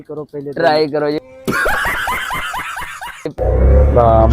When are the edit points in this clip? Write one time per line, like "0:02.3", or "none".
0:03.4